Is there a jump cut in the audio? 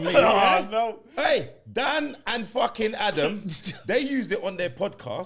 no; 0 cuts

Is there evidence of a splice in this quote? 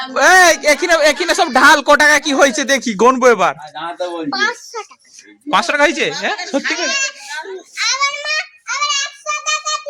no; 0 cuts

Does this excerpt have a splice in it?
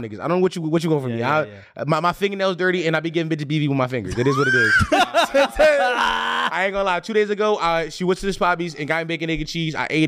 no; 0 cuts

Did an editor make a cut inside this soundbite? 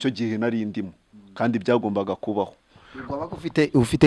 no; 0 cuts

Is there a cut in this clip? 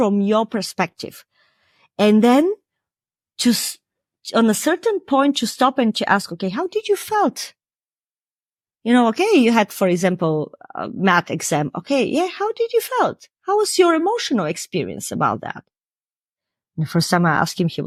no; 0 cuts

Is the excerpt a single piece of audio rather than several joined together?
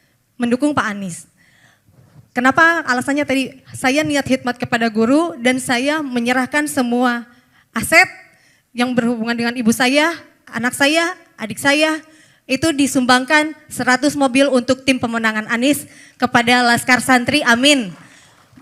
yes; 0 cuts

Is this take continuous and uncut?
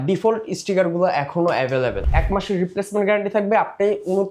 no; 1 cut; at 2.0 s

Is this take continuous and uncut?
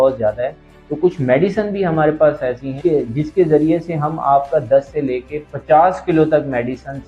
yes; 0 cuts

